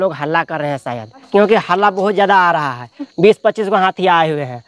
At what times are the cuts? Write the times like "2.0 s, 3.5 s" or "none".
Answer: 1.2 s, 3.0 s